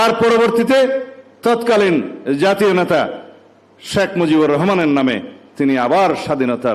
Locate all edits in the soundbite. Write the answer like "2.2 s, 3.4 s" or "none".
none